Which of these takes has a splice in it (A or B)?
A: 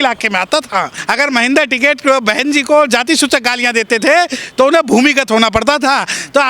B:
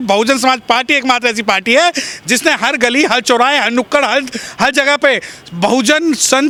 A